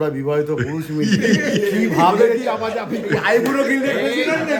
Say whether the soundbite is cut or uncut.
uncut